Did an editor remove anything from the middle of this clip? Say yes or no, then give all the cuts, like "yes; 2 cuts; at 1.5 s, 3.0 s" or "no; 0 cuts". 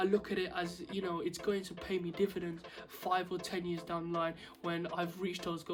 no; 0 cuts